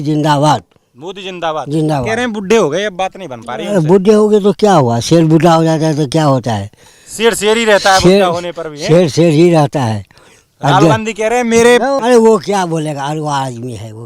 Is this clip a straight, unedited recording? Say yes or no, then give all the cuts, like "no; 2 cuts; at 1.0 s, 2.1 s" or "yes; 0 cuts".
no; 1 cut; at 12.0 s